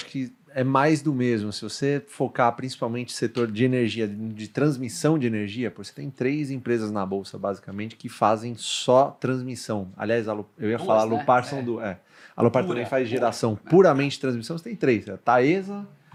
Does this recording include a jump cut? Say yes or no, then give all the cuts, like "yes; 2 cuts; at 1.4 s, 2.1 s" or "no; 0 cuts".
no; 0 cuts